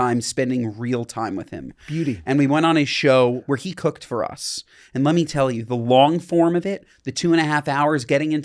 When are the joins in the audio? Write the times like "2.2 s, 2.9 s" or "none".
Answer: 3.4 s